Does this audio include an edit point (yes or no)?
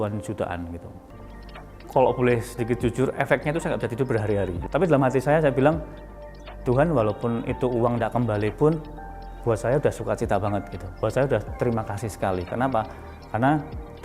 yes